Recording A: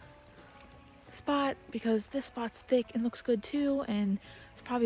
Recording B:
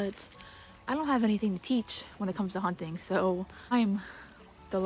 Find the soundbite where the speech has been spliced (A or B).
B